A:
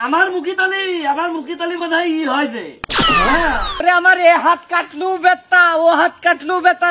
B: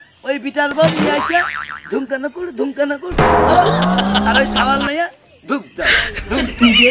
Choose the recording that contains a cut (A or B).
A